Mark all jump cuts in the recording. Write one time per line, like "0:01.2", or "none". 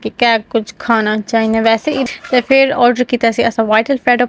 0:02.0